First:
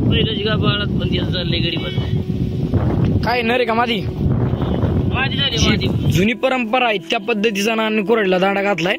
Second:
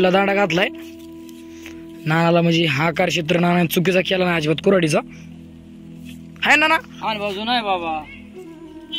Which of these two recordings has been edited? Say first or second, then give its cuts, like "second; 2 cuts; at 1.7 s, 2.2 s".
first; 1 cut; at 6.1 s